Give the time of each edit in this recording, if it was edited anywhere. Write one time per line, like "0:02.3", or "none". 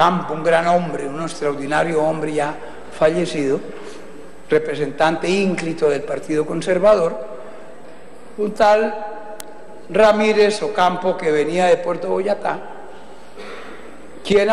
0:05.4